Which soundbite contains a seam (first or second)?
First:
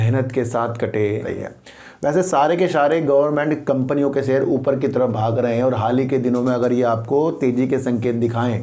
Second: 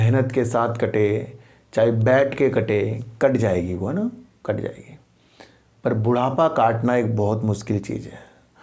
first